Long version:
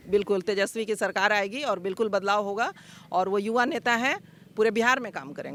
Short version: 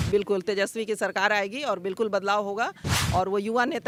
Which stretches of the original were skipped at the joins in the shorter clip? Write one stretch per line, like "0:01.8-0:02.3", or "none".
none